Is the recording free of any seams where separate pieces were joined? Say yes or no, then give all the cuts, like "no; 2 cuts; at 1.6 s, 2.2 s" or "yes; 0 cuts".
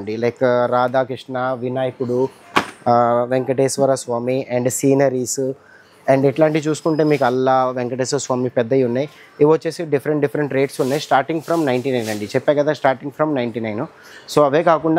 yes; 0 cuts